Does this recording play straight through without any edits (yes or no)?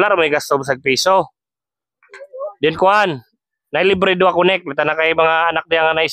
yes